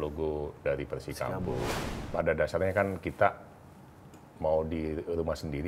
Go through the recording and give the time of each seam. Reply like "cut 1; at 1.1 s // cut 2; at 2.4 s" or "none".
cut 1; at 1.8 s